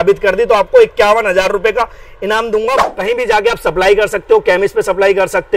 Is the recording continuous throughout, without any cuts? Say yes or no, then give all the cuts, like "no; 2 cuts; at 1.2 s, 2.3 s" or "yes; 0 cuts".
no; 1 cut; at 2.8 s